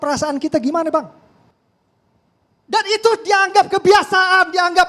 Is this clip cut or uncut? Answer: uncut